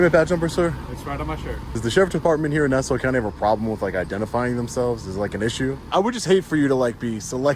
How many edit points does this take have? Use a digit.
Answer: 2